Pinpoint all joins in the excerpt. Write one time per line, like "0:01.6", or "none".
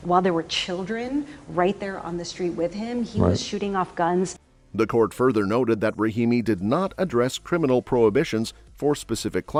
none